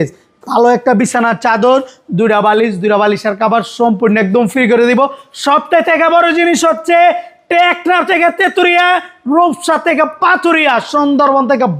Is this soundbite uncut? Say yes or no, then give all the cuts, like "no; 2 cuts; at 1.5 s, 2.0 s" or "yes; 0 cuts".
yes; 0 cuts